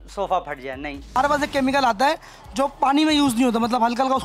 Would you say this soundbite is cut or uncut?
cut